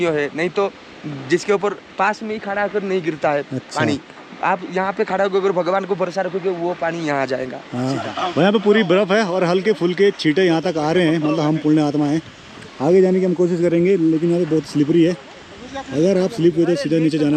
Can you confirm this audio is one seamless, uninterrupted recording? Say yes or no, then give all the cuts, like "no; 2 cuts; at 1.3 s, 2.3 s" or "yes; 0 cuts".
no; 1 cut; at 8.1 s